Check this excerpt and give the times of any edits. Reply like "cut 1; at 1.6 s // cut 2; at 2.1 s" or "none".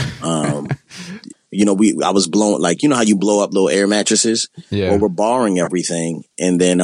cut 1; at 1.2 s